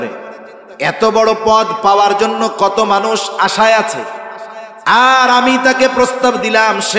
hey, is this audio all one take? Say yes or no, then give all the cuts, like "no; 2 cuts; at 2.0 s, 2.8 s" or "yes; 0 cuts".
yes; 0 cuts